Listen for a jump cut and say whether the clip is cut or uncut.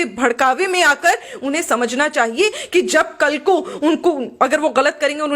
uncut